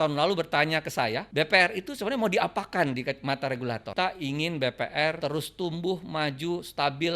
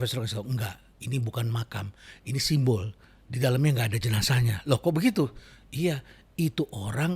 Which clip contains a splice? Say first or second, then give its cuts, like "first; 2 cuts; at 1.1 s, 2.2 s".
first; 3 cuts; at 1.2 s, 3.9 s, 5.2 s